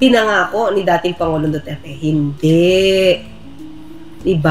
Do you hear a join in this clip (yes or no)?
no